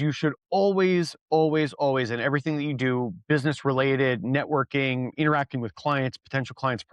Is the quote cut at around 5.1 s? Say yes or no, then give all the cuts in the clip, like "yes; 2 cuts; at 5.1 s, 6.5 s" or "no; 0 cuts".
yes; 1 cut; at 5.1 s